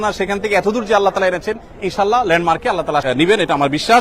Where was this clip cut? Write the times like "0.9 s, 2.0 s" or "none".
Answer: 3.0 s